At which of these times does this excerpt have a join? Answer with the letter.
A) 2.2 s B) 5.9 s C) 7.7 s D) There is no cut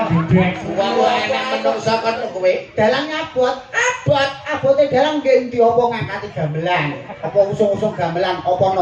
A